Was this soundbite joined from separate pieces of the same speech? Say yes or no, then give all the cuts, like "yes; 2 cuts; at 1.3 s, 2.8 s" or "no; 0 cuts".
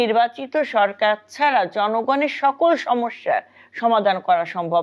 no; 0 cuts